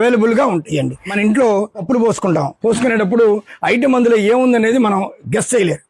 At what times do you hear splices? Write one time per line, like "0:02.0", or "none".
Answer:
0:01.0
0:01.8